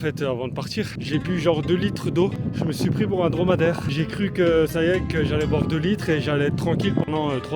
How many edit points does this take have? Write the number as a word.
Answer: three